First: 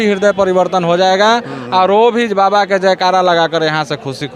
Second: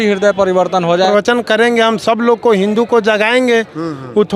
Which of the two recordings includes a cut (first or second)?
second